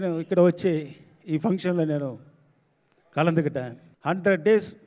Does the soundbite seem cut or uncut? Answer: cut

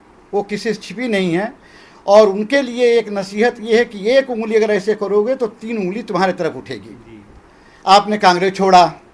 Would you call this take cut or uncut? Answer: uncut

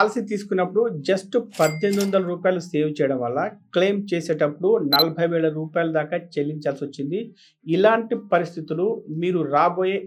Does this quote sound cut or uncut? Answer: uncut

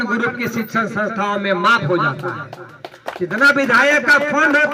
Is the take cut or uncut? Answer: uncut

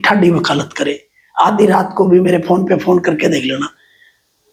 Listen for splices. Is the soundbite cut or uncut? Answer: uncut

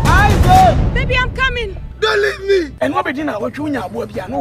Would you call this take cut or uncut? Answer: cut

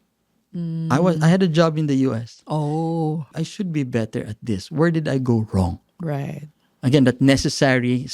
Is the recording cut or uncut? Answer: cut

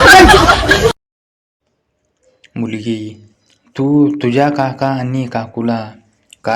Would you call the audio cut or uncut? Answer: cut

